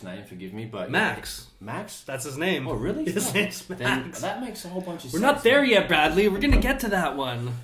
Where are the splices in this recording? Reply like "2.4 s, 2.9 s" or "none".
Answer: none